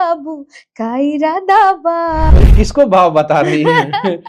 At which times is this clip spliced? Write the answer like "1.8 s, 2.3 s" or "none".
2.5 s